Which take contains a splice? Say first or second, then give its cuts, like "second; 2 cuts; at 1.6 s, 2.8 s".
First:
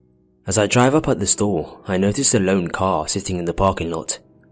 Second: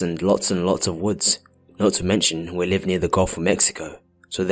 first; 1 cut; at 2.7 s